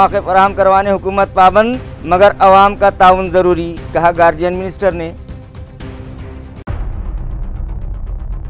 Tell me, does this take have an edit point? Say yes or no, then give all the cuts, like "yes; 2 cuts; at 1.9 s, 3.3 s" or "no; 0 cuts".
no; 0 cuts